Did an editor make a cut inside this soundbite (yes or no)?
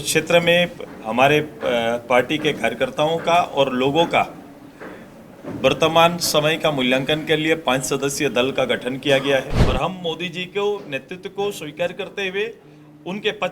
yes